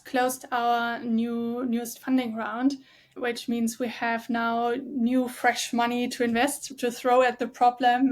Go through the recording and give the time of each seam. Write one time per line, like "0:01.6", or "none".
none